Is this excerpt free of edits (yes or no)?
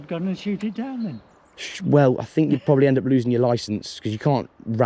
yes